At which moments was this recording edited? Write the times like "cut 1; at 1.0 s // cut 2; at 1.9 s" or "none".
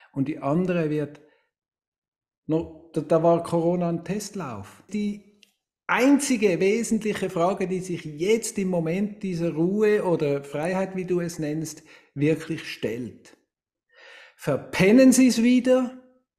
cut 1; at 4.9 s